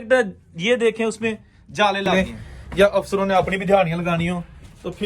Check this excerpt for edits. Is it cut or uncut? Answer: cut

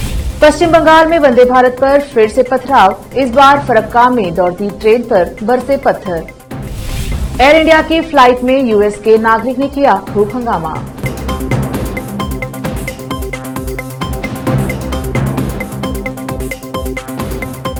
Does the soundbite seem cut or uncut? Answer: uncut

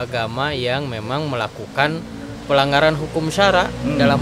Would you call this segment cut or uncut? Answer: uncut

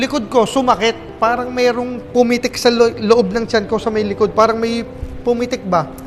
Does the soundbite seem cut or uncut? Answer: uncut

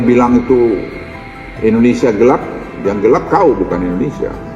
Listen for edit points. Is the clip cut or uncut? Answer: uncut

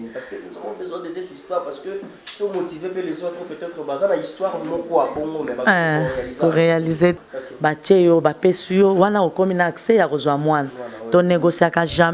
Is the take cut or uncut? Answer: cut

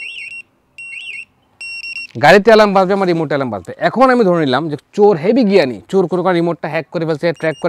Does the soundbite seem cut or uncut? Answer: uncut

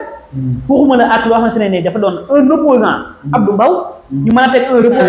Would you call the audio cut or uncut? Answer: uncut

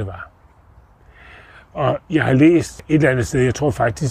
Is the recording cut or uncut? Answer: cut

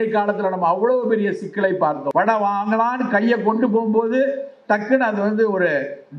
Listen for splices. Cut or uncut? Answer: cut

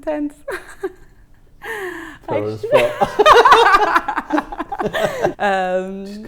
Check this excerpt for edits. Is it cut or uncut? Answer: cut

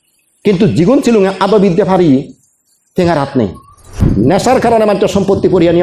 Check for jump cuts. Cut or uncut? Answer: cut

